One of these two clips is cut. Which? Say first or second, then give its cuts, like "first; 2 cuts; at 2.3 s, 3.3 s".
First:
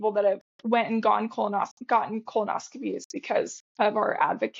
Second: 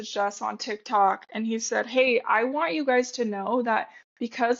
first; 1 cut; at 3.6 s